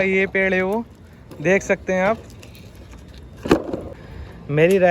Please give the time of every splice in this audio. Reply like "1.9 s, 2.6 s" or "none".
4.0 s